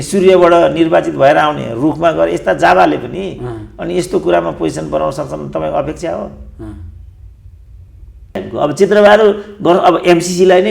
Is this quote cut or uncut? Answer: cut